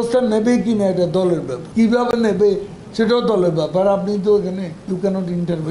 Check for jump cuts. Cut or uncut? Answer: cut